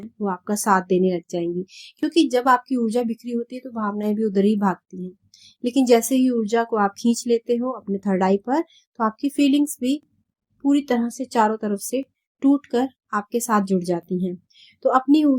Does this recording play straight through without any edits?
yes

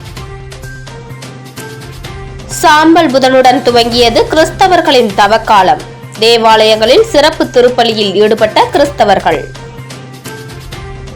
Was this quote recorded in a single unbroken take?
no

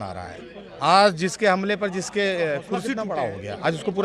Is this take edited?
yes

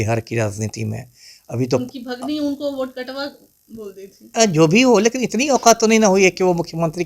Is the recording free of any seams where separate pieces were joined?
yes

